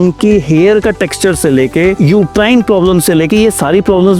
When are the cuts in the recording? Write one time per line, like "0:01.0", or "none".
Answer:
0:02.0